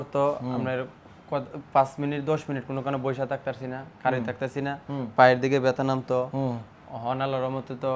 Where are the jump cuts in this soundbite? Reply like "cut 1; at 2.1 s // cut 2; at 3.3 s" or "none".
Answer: none